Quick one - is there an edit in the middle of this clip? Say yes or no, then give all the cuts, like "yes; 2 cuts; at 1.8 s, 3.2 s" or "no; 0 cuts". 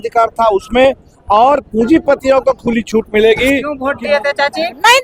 yes; 1 cut; at 3.8 s